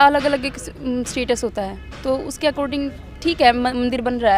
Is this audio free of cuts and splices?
yes; 0 cuts

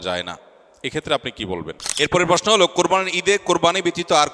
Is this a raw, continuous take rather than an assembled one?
no; 1 cut; at 1.8 s

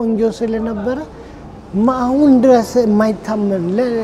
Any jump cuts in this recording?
no; 0 cuts

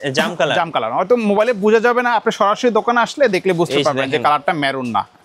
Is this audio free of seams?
yes; 0 cuts

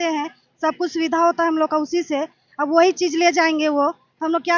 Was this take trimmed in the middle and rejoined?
no; 0 cuts

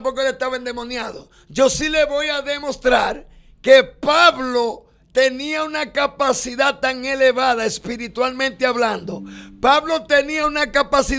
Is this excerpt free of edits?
yes; 0 cuts

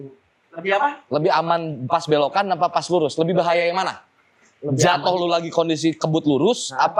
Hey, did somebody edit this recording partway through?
no; 0 cuts

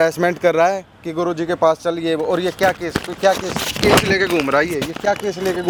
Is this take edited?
no; 0 cuts

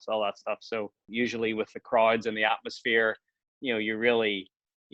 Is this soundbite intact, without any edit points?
no; 1 cut; at 1.0 s

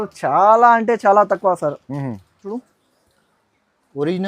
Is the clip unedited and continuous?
no; 1 cut; at 2.6 s

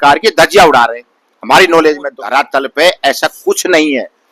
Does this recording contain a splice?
yes; 1 cut; at 2.2 s

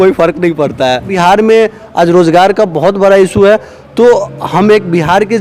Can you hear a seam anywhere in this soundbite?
yes; 1 cut; at 1.1 s

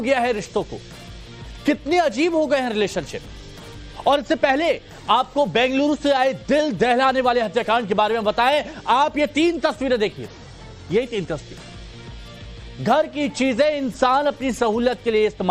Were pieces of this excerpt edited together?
no; 0 cuts

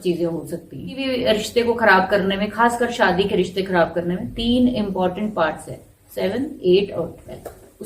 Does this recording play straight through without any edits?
no; 1 cut; at 1.1 s

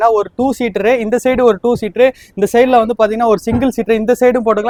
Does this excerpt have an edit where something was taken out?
no; 0 cuts

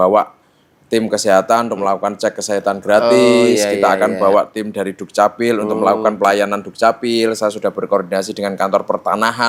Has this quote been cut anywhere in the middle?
no; 0 cuts

